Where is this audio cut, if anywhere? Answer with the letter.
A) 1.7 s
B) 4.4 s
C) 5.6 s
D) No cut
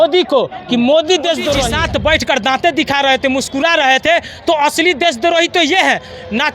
A